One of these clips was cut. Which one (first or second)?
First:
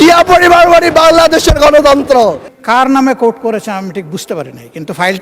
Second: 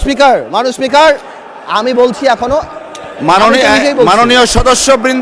first